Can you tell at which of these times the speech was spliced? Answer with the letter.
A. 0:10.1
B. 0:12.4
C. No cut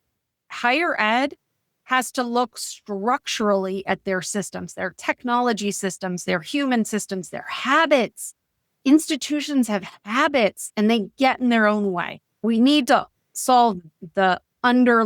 B